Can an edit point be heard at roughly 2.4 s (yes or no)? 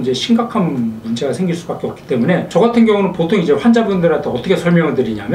no